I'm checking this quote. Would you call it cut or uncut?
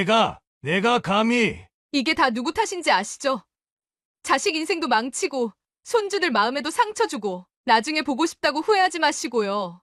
uncut